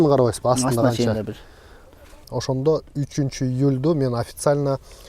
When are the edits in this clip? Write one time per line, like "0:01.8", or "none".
0:02.2